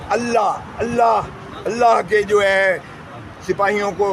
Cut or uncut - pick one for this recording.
uncut